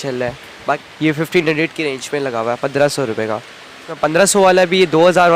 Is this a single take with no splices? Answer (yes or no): no